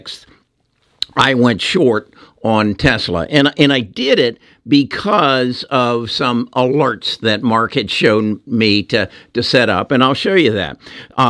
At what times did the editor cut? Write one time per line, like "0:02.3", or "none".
none